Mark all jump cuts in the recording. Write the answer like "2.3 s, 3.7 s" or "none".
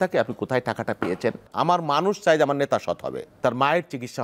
1.5 s, 3.4 s